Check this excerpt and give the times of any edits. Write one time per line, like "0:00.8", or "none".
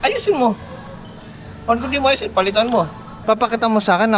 0:03.1